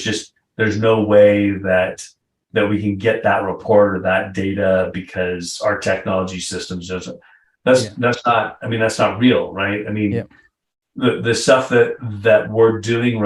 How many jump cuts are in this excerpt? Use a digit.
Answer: 1